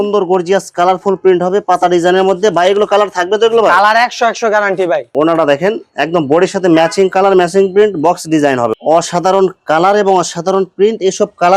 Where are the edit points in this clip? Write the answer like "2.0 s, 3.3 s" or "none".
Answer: 5.1 s, 8.7 s